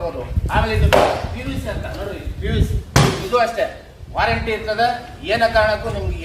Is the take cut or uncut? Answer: uncut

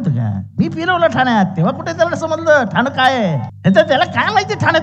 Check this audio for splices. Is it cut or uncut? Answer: cut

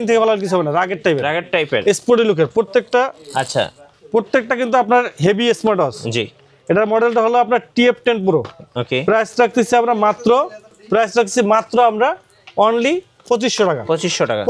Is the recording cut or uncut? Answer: uncut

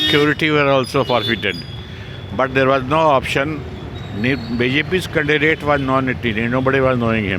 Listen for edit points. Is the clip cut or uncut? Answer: uncut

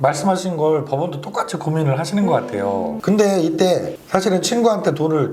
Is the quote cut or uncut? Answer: cut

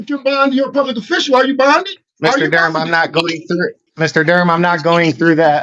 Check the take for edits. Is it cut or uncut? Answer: cut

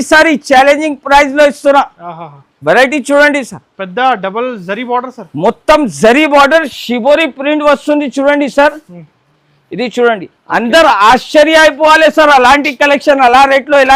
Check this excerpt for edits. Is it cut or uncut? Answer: uncut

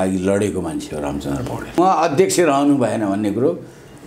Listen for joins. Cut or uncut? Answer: cut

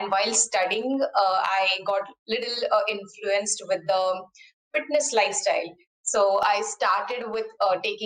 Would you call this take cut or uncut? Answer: uncut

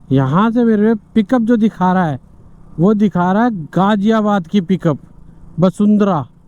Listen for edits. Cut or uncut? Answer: uncut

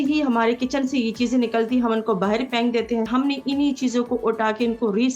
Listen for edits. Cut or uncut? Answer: cut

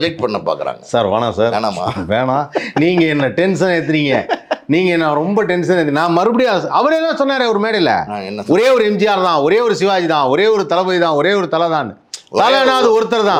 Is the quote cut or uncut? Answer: uncut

